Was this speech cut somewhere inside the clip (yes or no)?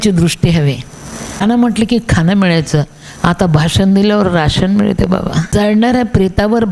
yes